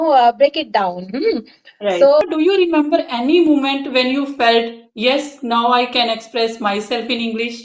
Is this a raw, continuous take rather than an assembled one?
no; 1 cut; at 2.2 s

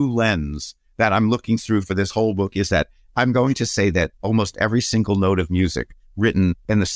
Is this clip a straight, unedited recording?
yes; 0 cuts

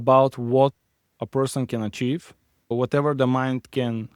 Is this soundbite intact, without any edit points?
no; 1 cut; at 2.7 s

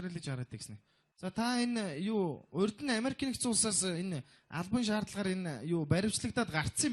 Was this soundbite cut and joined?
yes; 1 cut; at 1.6 s

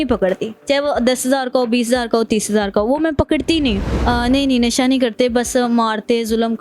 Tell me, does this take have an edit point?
yes; 1 cut; at 3.8 s

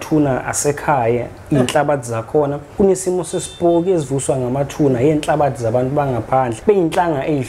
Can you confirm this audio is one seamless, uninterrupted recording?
no; 2 cuts; at 2.6 s, 6.6 s

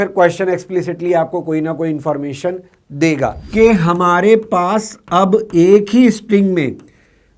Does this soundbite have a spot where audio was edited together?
yes; 1 cut; at 3.4 s

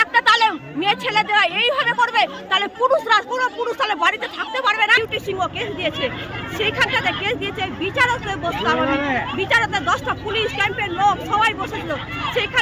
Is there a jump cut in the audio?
yes; 1 cut; at 4.9 s

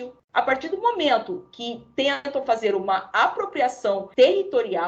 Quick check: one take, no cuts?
yes; 0 cuts

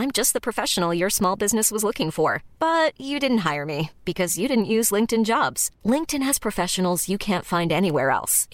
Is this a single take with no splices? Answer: yes; 0 cuts

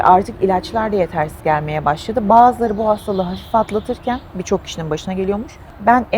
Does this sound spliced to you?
no; 0 cuts

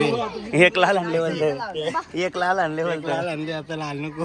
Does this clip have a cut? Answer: no; 0 cuts

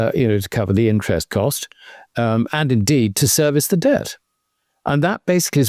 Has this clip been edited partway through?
no; 0 cuts

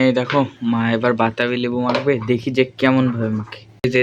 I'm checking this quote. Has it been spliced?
no; 0 cuts

